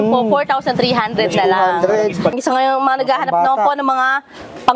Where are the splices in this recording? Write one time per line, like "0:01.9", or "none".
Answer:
0:02.3